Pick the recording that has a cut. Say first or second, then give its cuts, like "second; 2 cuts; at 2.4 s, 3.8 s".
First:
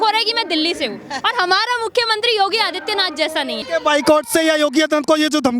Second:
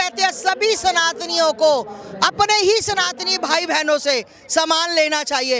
first; 1 cut; at 3.6 s